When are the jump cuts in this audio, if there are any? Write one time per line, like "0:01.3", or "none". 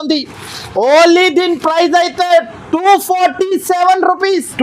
none